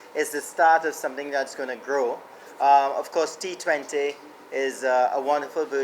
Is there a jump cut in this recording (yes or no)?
no